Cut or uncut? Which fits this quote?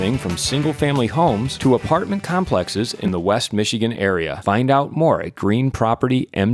uncut